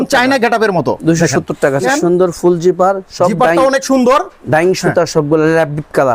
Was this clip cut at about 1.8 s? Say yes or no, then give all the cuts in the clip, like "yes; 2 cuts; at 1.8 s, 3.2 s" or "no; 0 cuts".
yes; 1 cut; at 1.8 s